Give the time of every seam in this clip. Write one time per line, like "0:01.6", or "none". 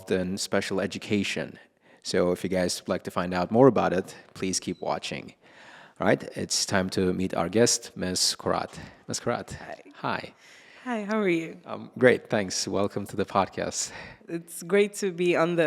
none